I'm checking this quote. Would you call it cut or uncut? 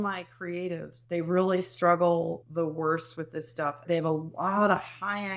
cut